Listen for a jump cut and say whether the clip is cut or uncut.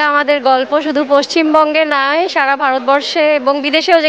uncut